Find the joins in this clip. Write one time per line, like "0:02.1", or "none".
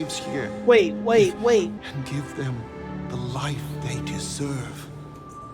0:01.8